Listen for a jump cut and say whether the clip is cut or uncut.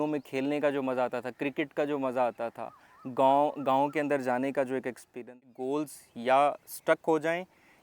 cut